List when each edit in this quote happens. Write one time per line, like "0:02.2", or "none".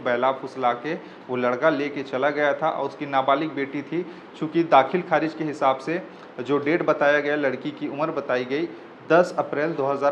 none